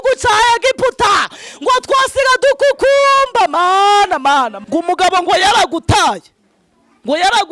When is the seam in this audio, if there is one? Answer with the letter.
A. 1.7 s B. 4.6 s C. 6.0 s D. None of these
B